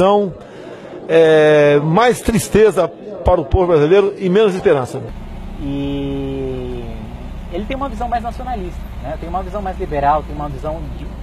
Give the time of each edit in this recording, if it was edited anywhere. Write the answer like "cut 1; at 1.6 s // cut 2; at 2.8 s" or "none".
none